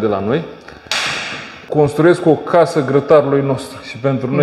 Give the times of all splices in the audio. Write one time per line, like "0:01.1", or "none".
0:01.5